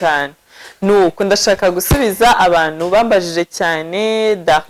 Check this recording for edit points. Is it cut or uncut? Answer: uncut